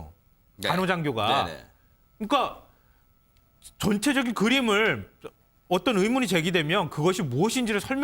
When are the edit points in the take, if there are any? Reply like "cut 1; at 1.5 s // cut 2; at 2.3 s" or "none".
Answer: none